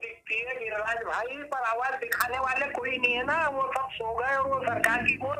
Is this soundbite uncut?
yes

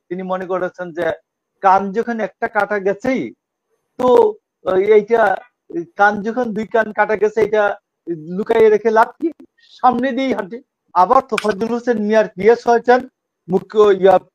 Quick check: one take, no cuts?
no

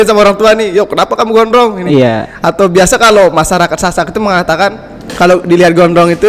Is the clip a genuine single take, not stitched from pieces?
yes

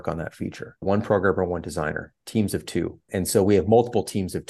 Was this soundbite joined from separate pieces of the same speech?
yes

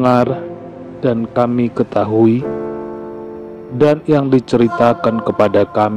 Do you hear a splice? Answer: no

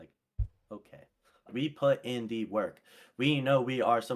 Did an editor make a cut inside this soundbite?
yes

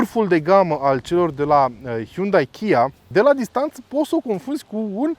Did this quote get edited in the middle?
yes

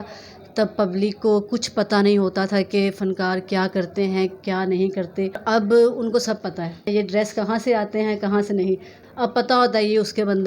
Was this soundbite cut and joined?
yes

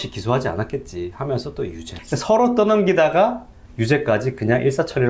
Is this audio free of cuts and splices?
yes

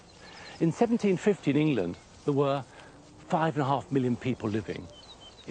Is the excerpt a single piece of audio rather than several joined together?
yes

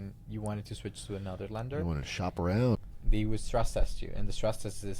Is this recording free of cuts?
no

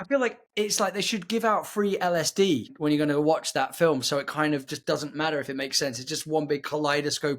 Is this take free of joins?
no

